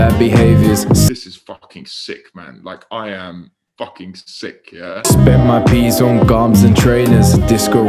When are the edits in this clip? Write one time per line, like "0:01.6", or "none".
0:01.1
0:05.1